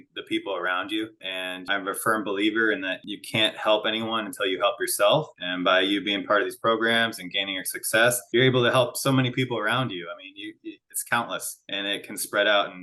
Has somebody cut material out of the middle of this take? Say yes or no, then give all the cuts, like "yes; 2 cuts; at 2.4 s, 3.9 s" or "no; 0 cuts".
yes; 1 cut; at 1.7 s